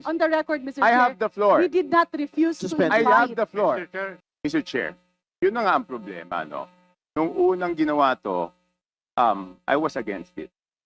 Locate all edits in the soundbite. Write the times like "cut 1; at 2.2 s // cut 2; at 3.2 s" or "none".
cut 1; at 4.2 s